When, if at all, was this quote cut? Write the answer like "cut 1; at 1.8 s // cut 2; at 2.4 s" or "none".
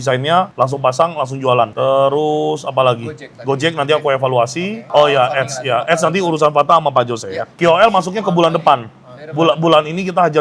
none